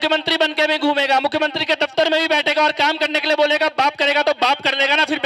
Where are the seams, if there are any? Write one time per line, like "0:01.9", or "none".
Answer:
none